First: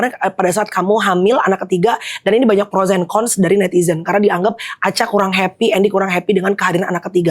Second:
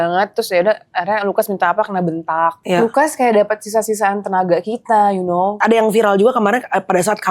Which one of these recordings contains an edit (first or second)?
second